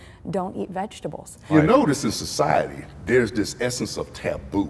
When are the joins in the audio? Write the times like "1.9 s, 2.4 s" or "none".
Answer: 1.5 s